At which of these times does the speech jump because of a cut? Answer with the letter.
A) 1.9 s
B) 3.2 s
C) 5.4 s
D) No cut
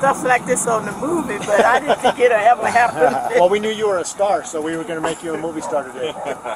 D